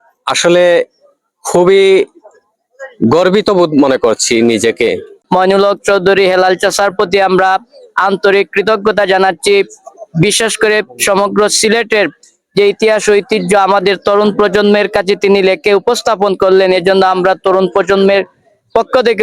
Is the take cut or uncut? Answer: cut